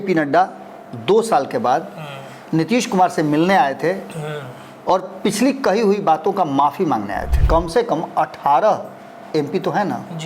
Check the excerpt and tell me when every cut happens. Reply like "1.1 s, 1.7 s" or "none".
7.3 s